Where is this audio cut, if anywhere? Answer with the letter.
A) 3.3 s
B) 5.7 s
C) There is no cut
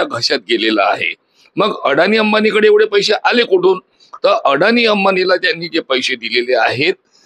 C